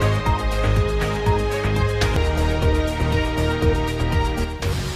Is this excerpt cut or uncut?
uncut